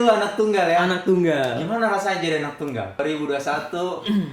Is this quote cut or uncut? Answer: cut